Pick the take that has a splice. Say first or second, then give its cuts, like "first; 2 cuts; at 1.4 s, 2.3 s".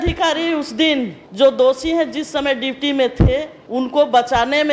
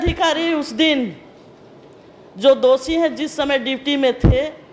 first; 2 cuts; at 1.2 s, 3.6 s